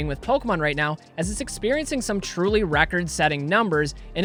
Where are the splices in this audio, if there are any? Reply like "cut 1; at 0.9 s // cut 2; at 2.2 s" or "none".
none